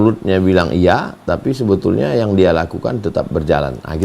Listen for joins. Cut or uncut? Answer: uncut